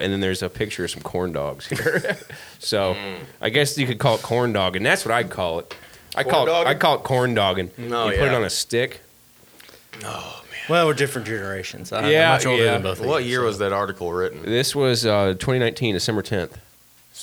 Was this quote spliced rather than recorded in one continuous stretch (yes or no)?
no